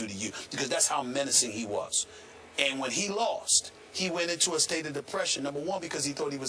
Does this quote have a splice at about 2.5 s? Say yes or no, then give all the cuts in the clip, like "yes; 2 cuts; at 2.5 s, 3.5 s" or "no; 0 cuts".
no; 1 cut; at 3.9 s